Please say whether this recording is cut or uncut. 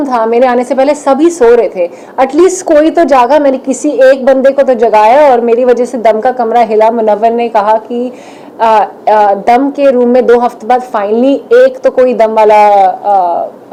uncut